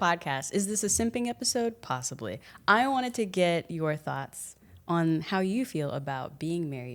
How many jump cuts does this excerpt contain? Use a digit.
0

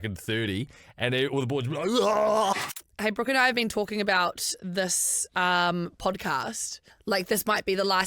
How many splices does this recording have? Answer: 2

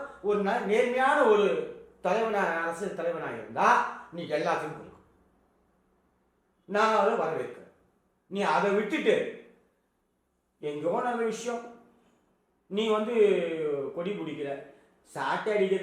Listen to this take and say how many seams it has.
0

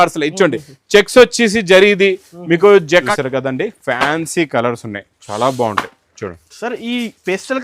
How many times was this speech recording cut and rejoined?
1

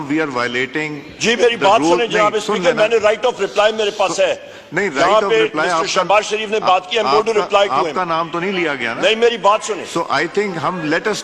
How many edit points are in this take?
0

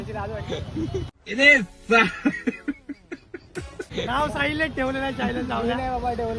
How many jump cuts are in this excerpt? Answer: 2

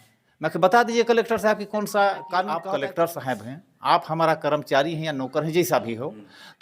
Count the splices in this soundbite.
1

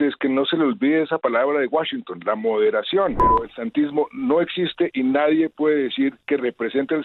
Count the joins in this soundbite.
1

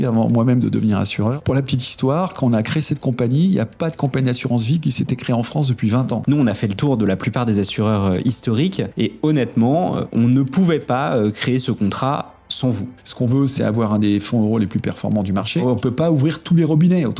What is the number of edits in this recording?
4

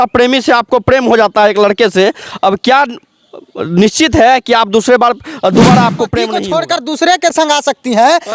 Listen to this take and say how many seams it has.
1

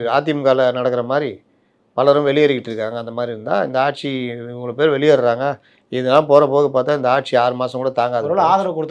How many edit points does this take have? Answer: 0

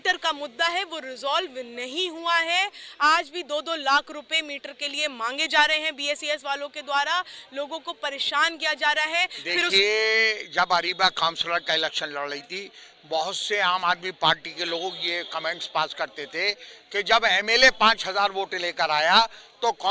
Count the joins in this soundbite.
1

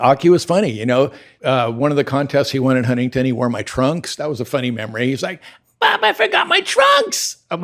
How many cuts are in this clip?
1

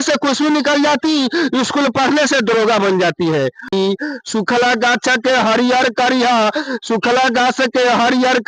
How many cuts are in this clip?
1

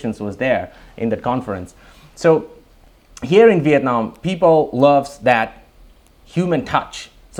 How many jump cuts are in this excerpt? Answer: 0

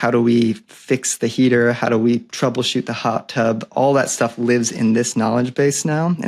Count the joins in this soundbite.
0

